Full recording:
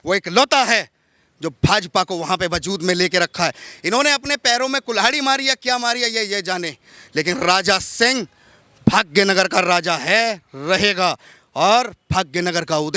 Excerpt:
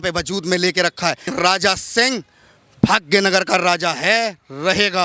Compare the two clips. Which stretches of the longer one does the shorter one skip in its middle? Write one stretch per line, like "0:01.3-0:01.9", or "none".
0:03.6-0:07.3